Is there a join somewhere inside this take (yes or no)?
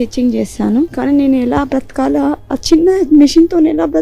yes